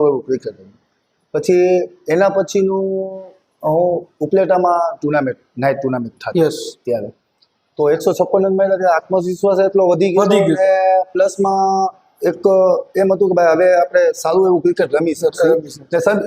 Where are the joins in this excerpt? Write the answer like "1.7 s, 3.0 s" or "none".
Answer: none

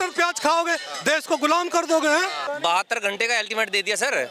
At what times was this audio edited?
2.4 s

